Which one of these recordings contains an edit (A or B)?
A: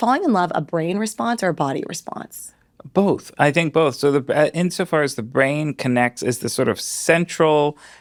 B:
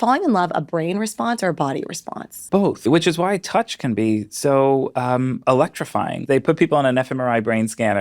B